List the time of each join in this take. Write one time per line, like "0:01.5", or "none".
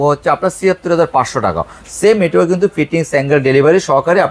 none

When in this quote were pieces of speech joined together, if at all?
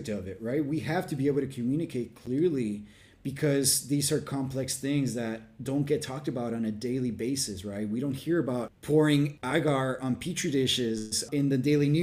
0:08.8
0:09.4
0:11.2

